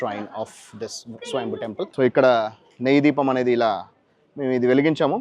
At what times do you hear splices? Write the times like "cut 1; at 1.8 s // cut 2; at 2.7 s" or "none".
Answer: cut 1; at 1.9 s